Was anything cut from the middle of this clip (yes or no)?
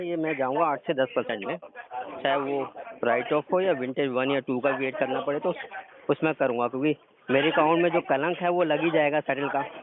no